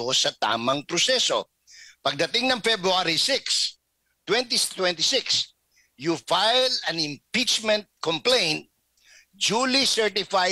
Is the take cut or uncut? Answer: uncut